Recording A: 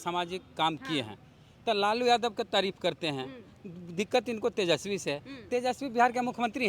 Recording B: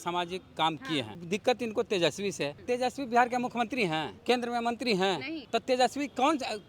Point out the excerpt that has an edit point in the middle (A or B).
B